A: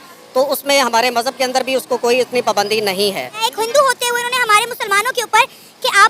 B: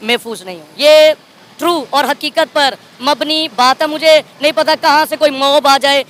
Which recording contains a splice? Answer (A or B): A